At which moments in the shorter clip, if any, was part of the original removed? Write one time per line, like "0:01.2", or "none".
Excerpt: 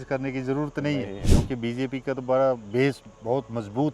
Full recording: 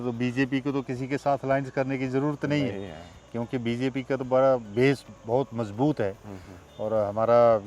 0:01.2